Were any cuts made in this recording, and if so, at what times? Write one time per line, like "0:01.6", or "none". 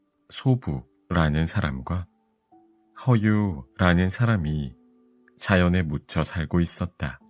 none

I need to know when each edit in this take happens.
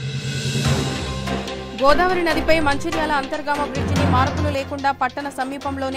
0:01.6

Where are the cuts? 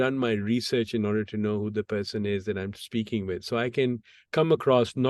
none

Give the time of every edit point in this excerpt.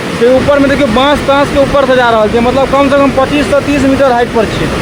none

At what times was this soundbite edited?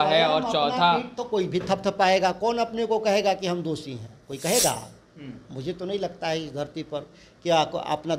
none

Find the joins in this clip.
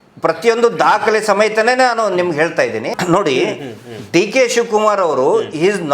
0:03.0

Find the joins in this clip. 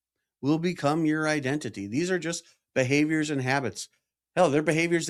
none

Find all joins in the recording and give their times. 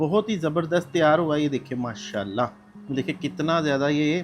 0:02.7

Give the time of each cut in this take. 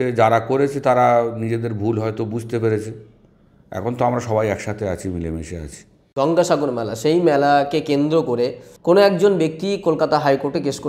0:06.0

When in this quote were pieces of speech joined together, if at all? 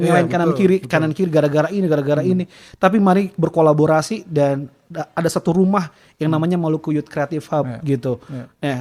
none

